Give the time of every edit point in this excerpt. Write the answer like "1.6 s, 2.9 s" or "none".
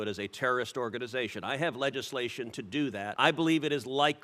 3.1 s